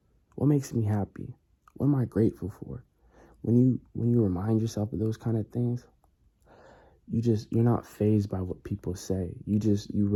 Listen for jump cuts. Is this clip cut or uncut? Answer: uncut